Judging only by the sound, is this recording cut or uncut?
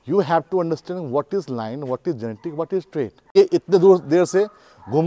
cut